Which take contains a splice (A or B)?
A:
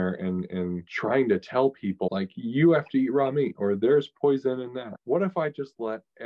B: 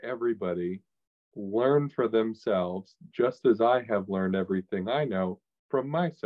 A